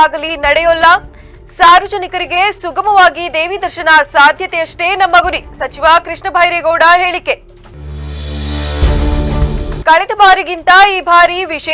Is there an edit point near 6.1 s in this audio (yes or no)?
no